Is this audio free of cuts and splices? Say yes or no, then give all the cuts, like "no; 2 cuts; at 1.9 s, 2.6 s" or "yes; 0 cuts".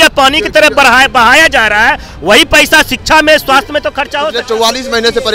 no; 1 cut; at 4.2 s